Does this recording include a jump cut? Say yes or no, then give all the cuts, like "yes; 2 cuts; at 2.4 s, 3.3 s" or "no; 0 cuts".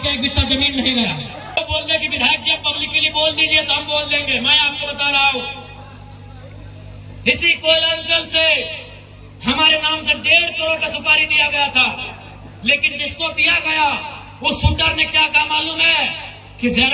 yes; 1 cut; at 1.6 s